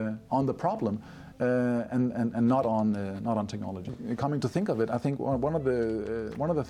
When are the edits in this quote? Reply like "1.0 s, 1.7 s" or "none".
3.9 s